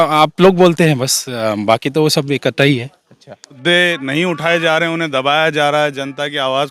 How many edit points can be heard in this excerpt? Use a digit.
1